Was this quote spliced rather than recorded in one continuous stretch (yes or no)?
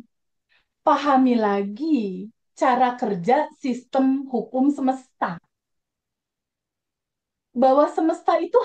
no